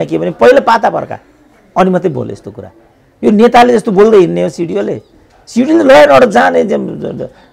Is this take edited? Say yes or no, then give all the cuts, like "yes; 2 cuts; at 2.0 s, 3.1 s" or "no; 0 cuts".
no; 0 cuts